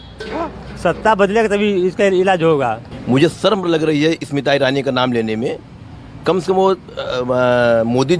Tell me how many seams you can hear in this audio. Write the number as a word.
one